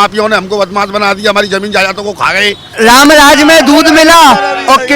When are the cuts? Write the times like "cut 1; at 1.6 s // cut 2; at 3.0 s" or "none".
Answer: cut 1; at 2.7 s